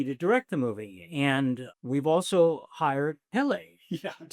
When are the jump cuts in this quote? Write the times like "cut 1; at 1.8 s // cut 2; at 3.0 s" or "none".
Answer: cut 1; at 1.7 s